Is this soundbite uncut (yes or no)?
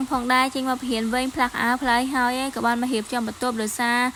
yes